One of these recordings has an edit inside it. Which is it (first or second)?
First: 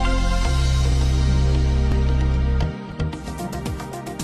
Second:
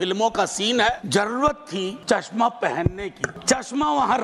second